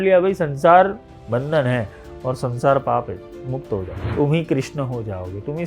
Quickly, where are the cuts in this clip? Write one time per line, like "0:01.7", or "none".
0:01.1
0:04.0